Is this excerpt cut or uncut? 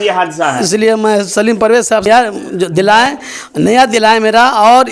cut